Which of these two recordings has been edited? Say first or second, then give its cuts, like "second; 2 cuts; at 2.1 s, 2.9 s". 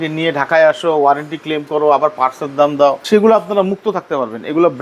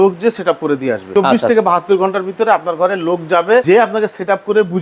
second; 2 cuts; at 1.0 s, 3.6 s